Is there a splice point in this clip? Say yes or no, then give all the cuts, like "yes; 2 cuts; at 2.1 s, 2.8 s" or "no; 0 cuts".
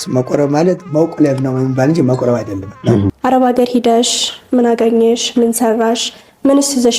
yes; 1 cut; at 3.1 s